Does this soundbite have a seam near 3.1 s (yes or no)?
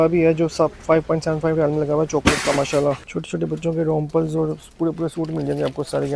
yes